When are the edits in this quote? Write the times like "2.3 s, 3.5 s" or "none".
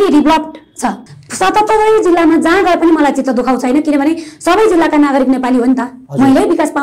1.0 s